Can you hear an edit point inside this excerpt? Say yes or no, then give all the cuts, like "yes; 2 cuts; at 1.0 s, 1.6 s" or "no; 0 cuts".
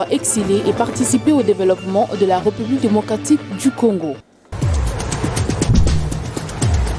yes; 1 cut; at 4.4 s